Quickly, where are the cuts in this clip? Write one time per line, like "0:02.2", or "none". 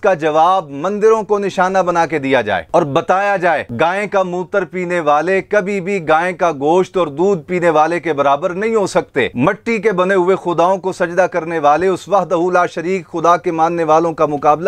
none